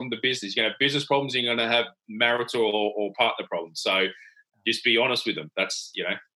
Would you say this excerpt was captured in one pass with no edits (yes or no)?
yes